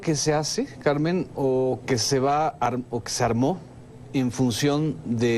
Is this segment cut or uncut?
uncut